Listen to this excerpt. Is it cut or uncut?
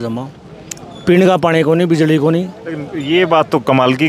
uncut